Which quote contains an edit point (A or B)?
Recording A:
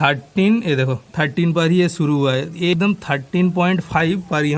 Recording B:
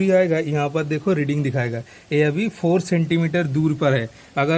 A